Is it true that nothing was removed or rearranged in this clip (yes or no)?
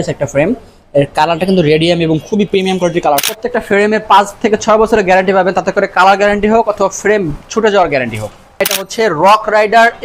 no